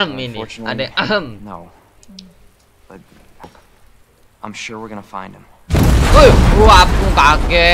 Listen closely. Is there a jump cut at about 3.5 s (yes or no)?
yes